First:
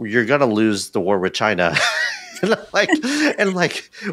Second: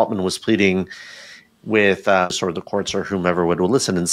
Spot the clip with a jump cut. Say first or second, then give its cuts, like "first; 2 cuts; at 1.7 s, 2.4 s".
second; 1 cut; at 2.4 s